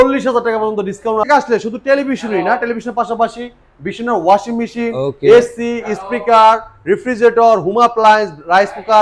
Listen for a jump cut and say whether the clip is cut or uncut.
cut